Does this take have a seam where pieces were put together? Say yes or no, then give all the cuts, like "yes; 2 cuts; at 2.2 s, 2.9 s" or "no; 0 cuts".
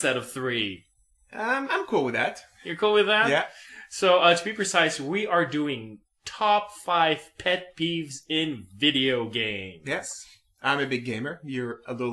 yes; 1 cut; at 9.8 s